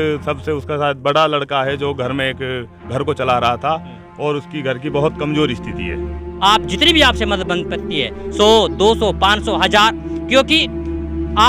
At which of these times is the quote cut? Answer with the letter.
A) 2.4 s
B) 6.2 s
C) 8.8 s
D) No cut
B